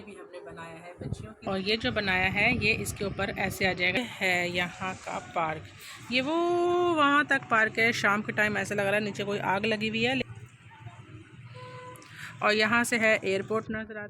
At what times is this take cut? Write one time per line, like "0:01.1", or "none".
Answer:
0:01.4
0:04.0
0:10.3